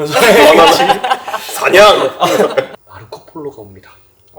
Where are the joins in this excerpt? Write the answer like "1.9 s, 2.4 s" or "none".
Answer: 2.8 s